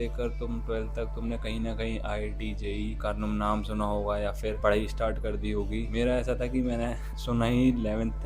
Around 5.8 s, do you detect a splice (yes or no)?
yes